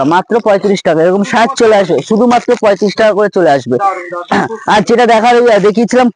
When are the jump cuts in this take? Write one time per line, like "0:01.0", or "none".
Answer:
none